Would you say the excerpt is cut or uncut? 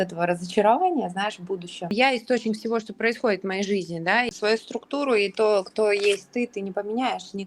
cut